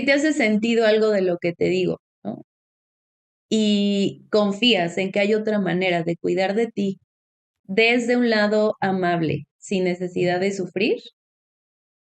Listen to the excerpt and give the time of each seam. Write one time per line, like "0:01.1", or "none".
none